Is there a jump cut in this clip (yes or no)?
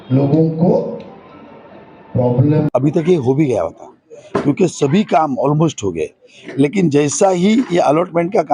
yes